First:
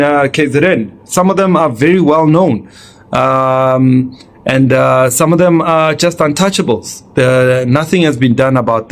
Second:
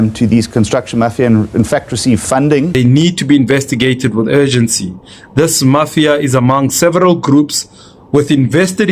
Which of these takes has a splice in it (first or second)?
second